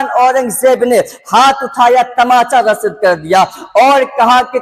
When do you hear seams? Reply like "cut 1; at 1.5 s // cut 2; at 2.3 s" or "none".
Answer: none